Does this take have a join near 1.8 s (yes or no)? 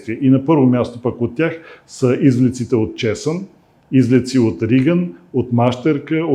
no